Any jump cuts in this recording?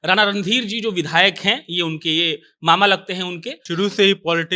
yes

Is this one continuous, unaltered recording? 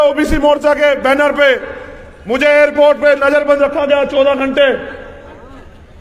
yes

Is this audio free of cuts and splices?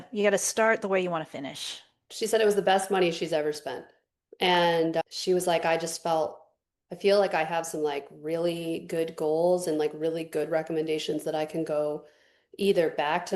no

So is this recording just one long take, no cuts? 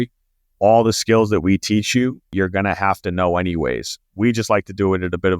no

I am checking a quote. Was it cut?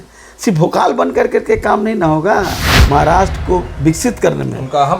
yes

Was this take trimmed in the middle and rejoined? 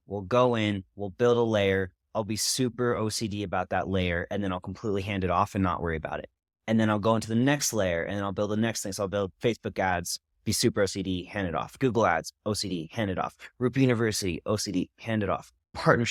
no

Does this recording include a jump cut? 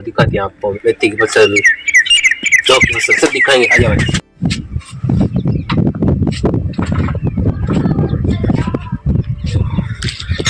no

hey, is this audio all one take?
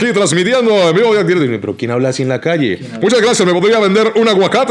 yes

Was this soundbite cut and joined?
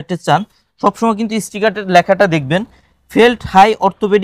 no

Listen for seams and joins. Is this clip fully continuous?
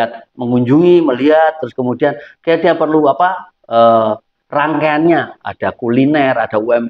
yes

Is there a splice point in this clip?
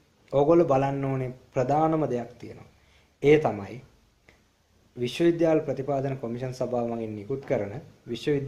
no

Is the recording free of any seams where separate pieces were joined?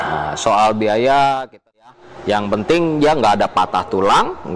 no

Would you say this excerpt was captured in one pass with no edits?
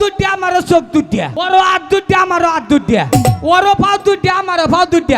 no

